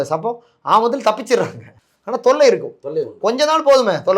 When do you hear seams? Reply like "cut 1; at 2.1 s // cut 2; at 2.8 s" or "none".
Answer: none